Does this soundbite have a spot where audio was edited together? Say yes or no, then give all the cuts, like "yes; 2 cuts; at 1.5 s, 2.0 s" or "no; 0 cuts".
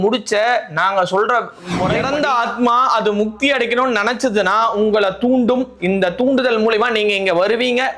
yes; 1 cut; at 2.0 s